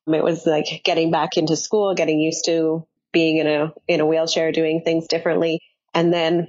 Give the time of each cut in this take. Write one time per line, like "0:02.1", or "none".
0:02.9